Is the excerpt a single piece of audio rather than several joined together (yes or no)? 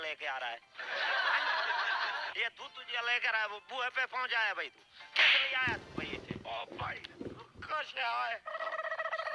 no